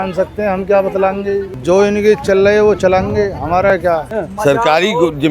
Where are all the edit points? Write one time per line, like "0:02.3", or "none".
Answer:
0:01.5
0:04.1